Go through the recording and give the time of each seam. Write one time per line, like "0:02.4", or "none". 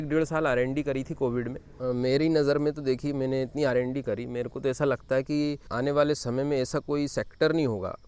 0:01.7
0:05.7